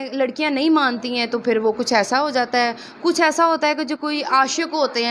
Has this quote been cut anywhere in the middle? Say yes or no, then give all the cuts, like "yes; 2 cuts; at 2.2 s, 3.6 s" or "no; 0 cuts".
no; 0 cuts